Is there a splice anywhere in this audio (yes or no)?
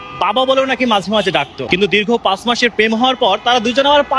yes